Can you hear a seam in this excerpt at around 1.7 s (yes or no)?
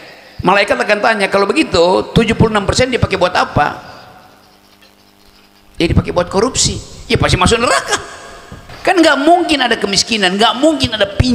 no